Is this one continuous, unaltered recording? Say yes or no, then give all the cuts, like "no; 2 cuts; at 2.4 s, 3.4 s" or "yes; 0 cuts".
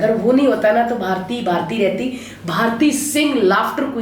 yes; 0 cuts